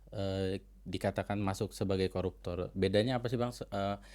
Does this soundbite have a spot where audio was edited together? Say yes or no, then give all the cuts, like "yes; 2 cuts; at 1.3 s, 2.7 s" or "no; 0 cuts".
no; 0 cuts